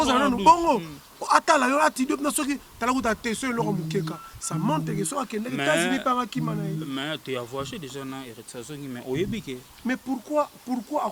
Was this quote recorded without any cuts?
yes; 0 cuts

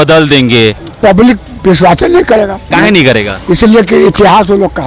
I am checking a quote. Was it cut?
yes; 2 cuts; at 0.9 s, 2.7 s

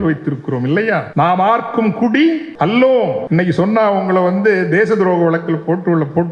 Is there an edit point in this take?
yes; 3 cuts; at 1.1 s, 2.5 s, 3.2 s

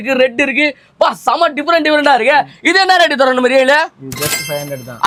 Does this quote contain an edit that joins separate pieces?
no; 0 cuts

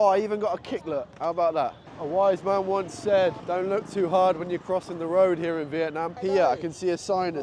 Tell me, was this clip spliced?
yes; 3 cuts; at 1.9 s, 3.4 s, 6.1 s

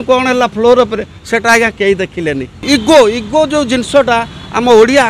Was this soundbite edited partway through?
yes; 1 cut; at 2.7 s

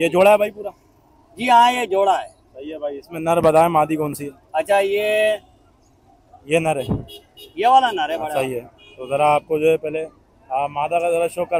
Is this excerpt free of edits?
yes; 0 cuts

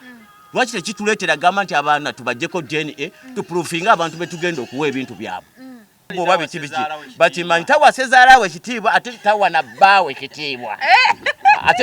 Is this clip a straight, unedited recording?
no; 1 cut; at 6.0 s

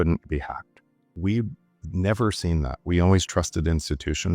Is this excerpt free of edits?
no; 1 cut; at 1.1 s

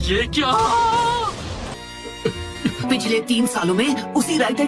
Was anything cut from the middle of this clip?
yes; 1 cut; at 1.8 s

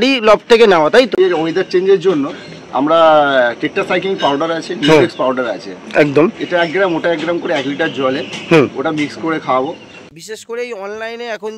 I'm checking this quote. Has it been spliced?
yes; 2 cuts; at 1.2 s, 10.1 s

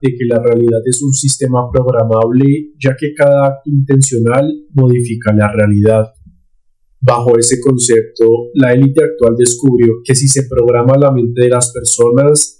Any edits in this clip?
no; 0 cuts

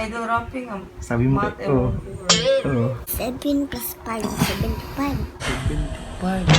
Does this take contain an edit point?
yes; 1 cut; at 3.1 s

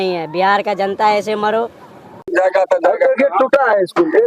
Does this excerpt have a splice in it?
yes; 1 cut; at 2.2 s

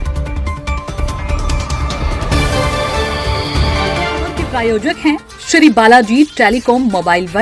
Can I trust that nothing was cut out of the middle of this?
yes; 0 cuts

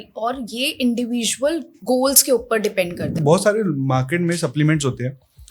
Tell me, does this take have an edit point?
yes; 2 cuts; at 1.7 s, 3.1 s

